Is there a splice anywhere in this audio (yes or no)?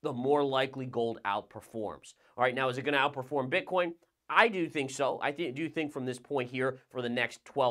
no